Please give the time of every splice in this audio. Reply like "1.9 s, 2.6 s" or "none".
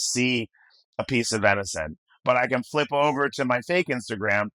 none